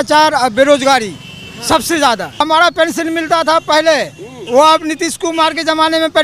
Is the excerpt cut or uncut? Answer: cut